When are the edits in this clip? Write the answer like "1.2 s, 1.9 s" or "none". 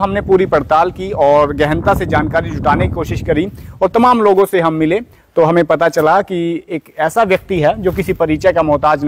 none